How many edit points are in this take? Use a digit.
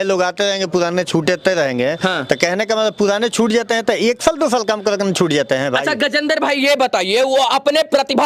0